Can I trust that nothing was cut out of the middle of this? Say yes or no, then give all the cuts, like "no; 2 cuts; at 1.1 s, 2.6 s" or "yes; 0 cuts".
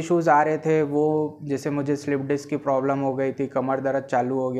yes; 0 cuts